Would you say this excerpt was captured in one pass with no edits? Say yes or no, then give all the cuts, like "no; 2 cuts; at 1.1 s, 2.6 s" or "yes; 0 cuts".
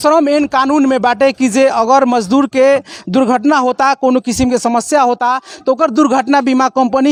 yes; 0 cuts